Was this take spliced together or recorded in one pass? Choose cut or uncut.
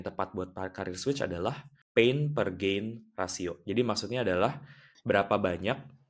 cut